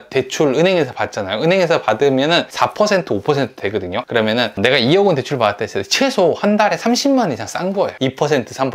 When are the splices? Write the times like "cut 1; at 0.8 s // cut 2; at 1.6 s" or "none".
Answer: cut 1; at 2.5 s // cut 2; at 4.0 s // cut 3; at 7.9 s

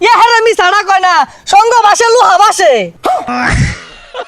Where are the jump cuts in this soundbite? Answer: cut 1; at 3.3 s

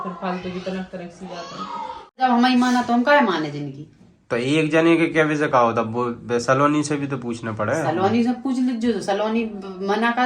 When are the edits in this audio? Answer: cut 1; at 2.2 s

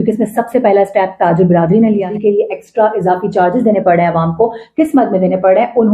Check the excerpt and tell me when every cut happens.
cut 1; at 2.1 s

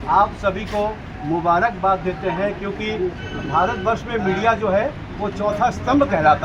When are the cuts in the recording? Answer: none

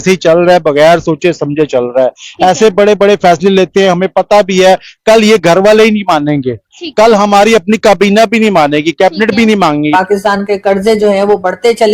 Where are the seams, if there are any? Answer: cut 1; at 9.9 s

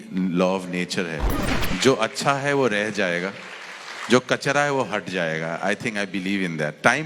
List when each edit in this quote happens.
cut 1; at 1.3 s

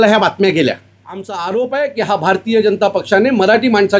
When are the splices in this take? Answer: cut 1; at 1.3 s

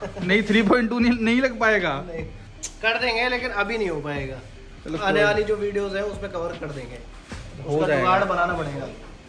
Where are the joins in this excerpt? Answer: none

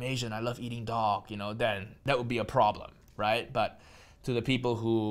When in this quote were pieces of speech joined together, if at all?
cut 1; at 2.0 s

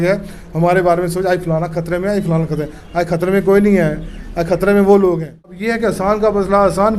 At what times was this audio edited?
cut 1; at 5.5 s

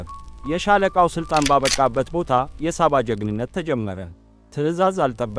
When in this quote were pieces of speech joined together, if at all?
cut 1; at 1.6 s

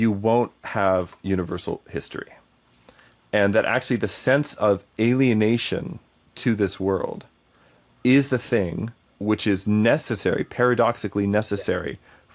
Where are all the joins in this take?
cut 1; at 9.1 s

